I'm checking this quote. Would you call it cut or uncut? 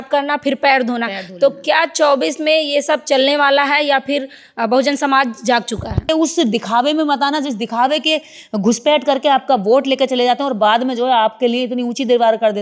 cut